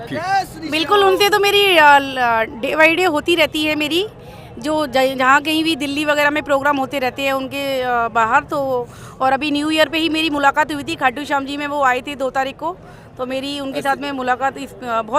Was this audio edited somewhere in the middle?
no; 0 cuts

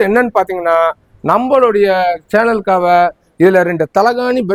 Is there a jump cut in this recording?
no; 0 cuts

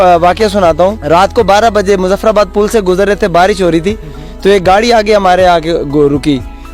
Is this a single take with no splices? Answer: no; 1 cut; at 1.0 s

